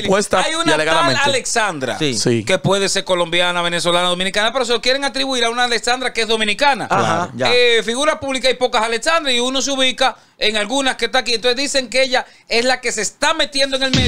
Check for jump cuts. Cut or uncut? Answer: uncut